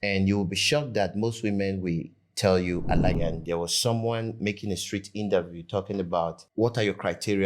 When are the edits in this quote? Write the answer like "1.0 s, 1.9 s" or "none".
3.2 s

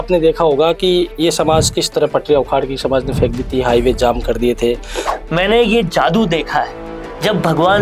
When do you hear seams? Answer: 5.0 s

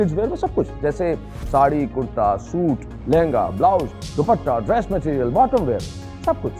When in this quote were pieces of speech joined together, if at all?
none

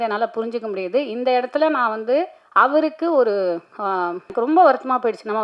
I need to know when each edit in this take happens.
4.3 s

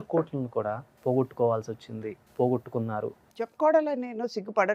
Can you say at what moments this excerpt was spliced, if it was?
0.9 s, 2.2 s, 3.2 s

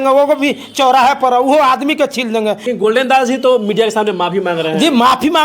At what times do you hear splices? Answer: 2.6 s

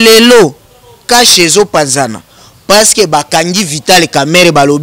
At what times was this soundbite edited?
none

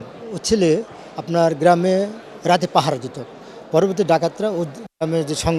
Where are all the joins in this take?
none

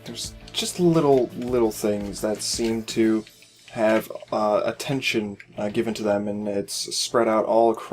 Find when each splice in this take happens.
5.6 s

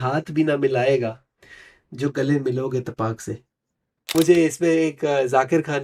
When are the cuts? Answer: 4.1 s

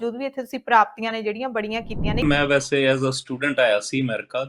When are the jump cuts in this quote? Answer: 2.2 s

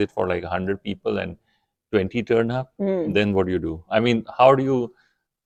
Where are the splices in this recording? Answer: none

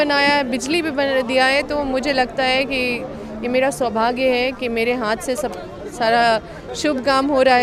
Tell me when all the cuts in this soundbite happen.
none

